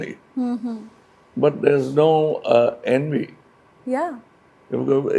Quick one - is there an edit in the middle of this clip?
no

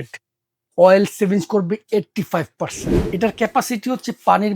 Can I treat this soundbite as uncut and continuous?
no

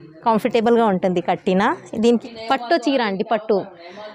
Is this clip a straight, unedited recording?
no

